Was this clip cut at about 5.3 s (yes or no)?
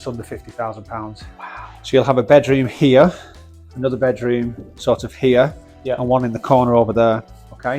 no